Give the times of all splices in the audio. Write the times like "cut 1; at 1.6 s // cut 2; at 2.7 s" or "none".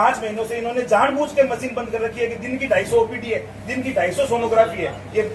none